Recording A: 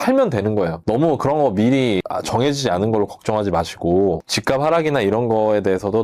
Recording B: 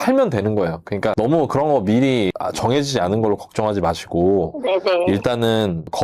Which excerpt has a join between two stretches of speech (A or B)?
A